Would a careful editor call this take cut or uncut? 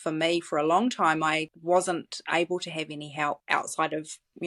cut